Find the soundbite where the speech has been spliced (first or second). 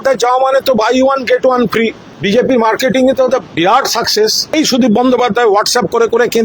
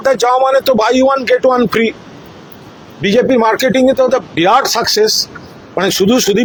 first